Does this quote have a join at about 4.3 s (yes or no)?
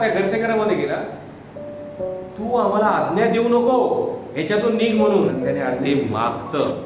no